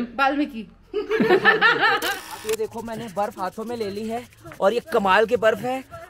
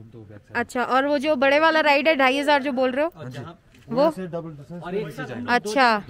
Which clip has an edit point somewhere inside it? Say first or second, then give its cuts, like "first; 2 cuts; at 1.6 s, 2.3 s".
first; 1 cut; at 2.1 s